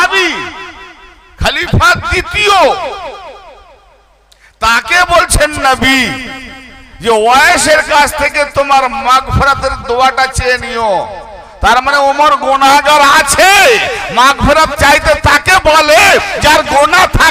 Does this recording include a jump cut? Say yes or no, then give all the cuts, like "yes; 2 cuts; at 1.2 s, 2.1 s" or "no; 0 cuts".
no; 0 cuts